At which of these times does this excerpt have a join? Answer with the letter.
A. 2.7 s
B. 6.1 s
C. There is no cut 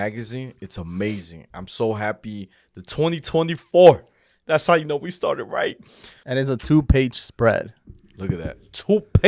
B